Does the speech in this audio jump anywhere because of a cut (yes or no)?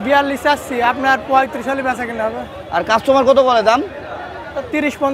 no